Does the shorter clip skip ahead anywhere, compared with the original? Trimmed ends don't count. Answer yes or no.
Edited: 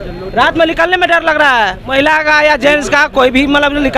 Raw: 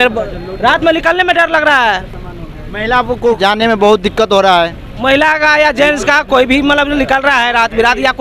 yes